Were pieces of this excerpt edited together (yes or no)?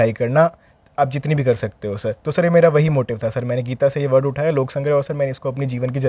no